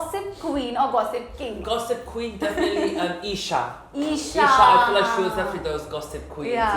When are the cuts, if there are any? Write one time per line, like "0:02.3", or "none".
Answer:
0:01.6